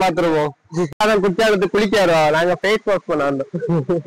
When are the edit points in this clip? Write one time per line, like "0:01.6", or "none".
0:00.9